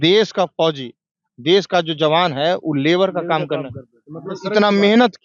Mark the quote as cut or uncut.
uncut